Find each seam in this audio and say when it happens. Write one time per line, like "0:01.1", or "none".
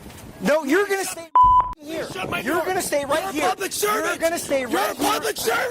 0:01.1
0:02.0